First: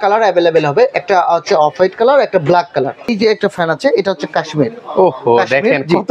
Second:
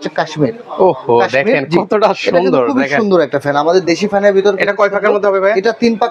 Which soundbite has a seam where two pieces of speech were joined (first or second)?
first